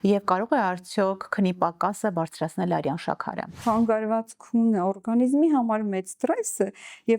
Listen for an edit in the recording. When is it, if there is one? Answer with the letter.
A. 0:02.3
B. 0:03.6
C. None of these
B